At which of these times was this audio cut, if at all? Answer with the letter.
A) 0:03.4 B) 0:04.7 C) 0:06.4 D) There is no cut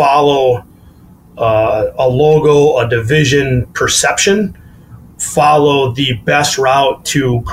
D